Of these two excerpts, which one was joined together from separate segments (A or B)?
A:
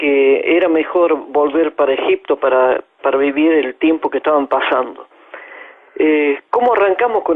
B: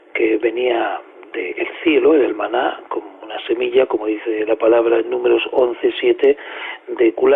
A